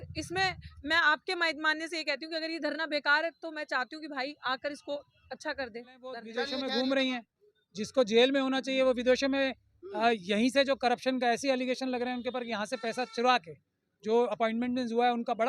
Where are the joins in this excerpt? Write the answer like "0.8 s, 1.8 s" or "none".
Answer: 6.2 s